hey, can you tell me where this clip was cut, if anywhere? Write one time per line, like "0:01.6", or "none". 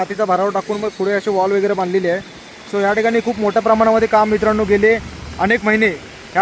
none